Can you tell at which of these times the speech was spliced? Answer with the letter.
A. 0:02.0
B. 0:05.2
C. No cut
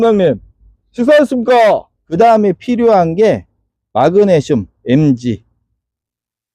A